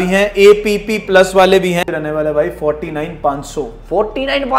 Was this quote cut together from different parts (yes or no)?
yes